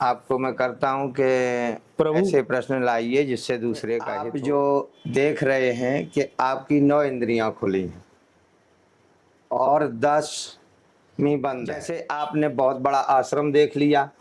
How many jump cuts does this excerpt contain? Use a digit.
2